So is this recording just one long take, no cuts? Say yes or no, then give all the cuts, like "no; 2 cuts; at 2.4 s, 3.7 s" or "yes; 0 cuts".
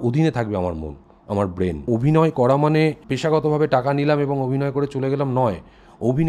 no; 2 cuts; at 1.8 s, 3.1 s